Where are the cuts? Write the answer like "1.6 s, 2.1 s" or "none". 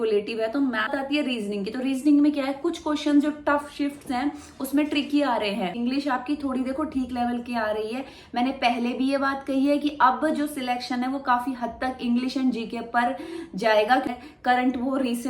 0.9 s, 5.7 s, 14.1 s

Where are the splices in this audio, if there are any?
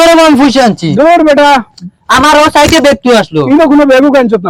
none

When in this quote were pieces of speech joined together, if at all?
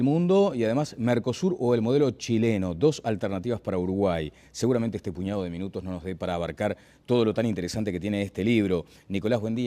2.5 s

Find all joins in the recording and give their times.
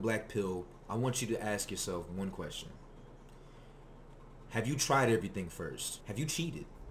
5.9 s

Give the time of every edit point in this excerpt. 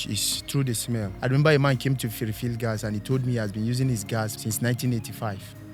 1.1 s, 4.4 s

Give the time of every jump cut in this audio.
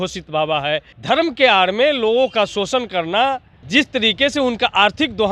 0.9 s, 3.5 s

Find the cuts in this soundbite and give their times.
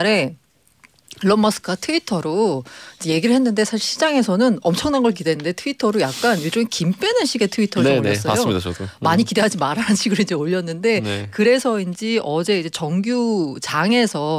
none

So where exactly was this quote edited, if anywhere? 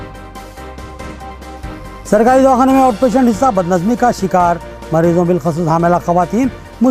1.3 s

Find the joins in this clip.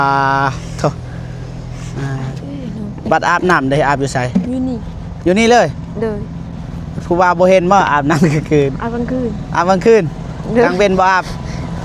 none

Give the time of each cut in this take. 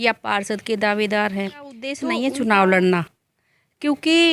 2.0 s

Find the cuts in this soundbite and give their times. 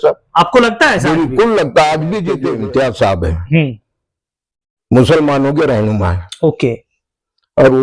2.3 s

